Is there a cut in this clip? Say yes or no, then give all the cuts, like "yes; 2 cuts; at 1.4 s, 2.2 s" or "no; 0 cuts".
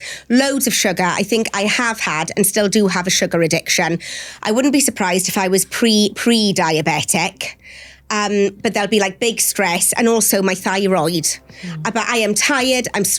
no; 0 cuts